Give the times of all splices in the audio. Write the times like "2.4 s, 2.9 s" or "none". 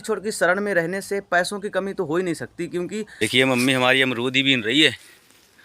3.0 s